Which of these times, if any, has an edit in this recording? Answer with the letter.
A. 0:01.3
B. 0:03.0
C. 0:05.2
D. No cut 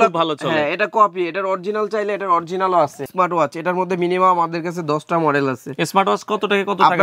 B